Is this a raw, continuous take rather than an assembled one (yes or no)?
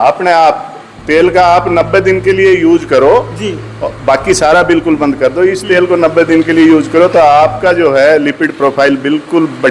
yes